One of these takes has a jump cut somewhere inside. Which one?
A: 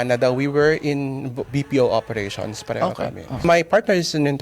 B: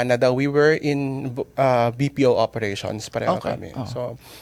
A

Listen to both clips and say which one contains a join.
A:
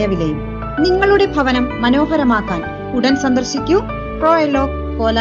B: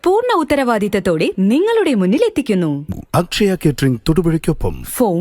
B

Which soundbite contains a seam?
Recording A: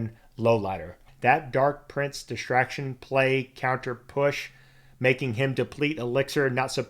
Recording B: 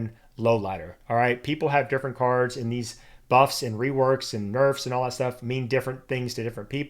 A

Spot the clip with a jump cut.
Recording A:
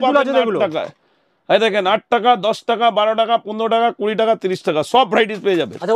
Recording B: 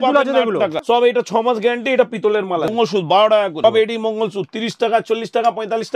B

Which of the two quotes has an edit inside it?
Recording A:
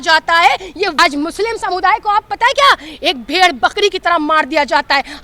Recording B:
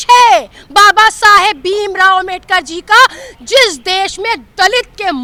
A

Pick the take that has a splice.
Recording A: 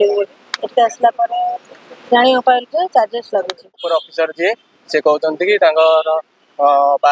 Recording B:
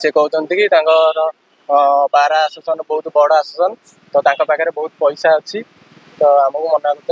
A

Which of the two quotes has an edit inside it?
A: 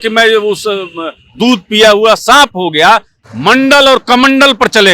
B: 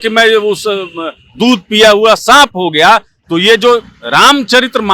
A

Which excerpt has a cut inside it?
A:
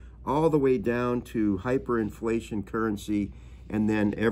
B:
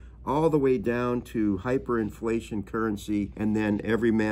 B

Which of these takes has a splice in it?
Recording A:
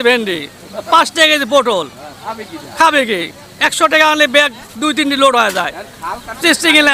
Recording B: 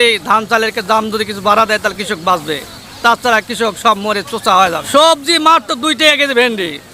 B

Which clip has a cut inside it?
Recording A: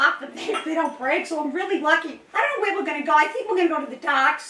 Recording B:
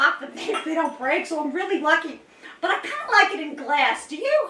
A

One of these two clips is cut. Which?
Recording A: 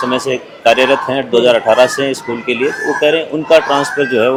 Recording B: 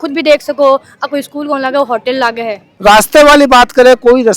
B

